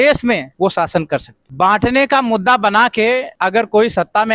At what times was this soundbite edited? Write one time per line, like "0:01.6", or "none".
0:01.4
0:03.3